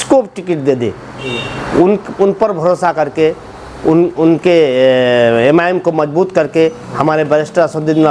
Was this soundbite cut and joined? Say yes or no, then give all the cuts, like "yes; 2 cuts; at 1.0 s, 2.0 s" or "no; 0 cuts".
no; 0 cuts